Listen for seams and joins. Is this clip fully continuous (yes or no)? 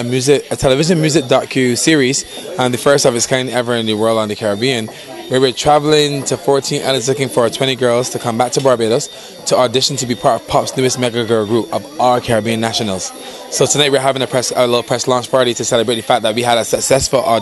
yes